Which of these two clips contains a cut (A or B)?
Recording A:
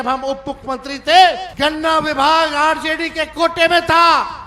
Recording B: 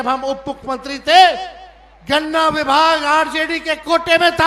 A